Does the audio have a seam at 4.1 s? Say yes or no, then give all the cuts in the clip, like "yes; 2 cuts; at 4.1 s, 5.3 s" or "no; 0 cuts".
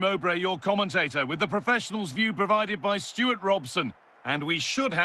yes; 1 cut; at 4.1 s